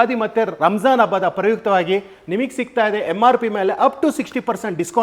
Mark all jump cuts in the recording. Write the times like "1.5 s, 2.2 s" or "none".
none